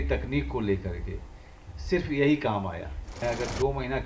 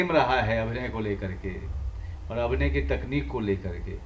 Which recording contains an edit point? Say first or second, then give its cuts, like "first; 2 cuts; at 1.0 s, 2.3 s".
first; 1 cut; at 3.0 s